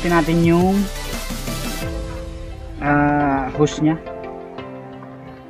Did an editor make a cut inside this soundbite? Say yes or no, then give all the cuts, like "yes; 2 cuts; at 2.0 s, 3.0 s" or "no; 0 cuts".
no; 0 cuts